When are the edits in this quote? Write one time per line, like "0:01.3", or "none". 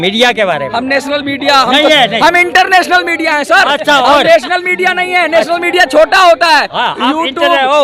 none